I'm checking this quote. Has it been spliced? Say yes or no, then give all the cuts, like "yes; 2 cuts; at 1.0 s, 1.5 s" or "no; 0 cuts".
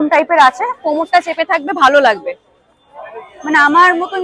no; 0 cuts